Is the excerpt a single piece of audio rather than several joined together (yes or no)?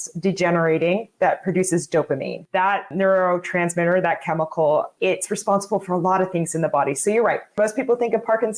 no